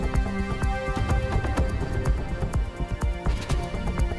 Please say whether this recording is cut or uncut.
uncut